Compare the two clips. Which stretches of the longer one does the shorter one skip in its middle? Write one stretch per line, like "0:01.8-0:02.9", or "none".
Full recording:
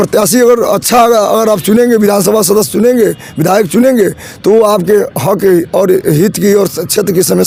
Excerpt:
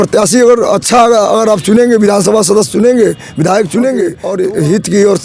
0:04.2-0:05.7

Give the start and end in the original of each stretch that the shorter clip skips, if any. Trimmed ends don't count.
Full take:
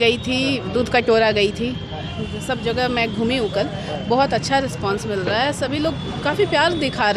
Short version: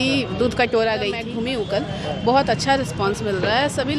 0:01.6-0:03.1

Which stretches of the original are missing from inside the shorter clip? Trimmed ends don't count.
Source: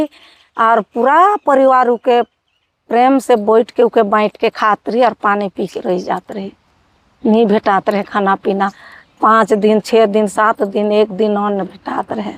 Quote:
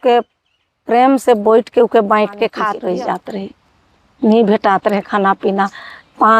0:04.7-0:05.7

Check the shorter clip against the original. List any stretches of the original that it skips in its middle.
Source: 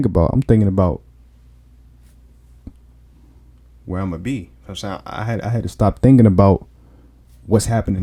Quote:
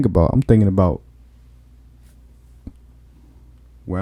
none

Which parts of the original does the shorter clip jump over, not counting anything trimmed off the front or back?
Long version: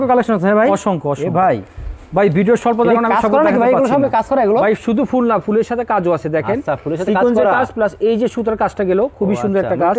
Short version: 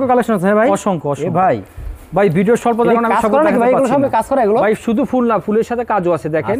none

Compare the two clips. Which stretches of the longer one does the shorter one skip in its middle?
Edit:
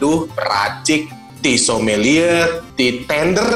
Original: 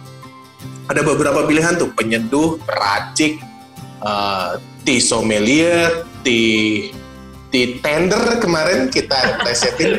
0:03.6-0:04.7
0:06.1-0:07.4

